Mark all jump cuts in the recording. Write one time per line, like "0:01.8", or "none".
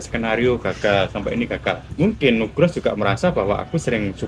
0:01.9